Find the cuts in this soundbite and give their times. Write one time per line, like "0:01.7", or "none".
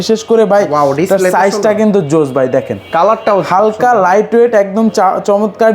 none